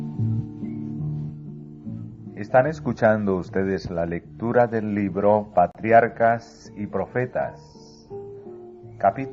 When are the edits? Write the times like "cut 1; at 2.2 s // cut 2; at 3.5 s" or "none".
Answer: none